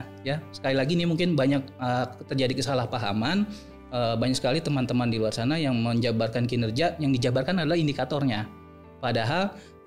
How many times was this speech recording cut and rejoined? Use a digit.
0